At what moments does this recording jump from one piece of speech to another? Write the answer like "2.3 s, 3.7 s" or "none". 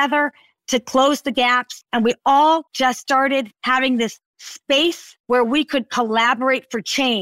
1.8 s